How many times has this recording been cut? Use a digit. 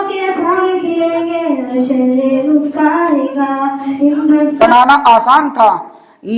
1